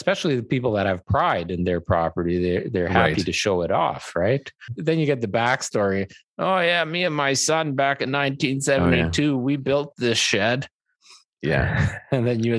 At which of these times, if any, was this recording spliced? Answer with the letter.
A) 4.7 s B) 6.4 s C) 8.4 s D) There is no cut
A